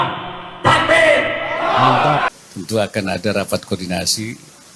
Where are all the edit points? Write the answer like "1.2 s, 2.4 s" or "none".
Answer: 2.4 s